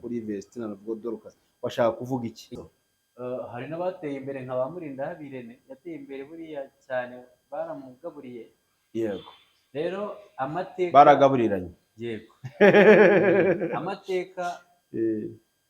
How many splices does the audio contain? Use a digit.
1